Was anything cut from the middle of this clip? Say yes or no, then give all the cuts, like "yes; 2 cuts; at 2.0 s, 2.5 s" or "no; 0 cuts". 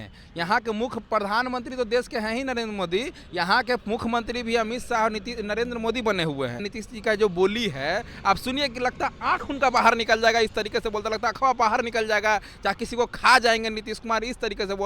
yes; 1 cut; at 6.7 s